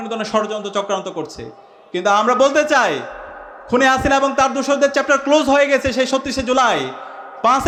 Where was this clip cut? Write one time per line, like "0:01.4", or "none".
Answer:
none